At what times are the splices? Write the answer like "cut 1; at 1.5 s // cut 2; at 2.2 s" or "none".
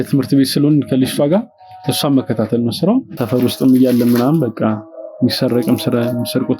cut 1; at 3.1 s